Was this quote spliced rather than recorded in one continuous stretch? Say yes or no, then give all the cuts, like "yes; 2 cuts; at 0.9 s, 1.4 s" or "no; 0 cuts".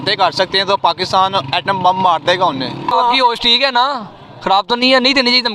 yes; 1 cut; at 2.9 s